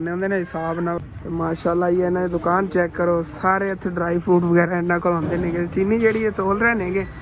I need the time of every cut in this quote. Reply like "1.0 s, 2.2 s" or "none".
1.0 s